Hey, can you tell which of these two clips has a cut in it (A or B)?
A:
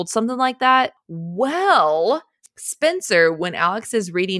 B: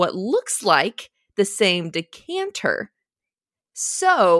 A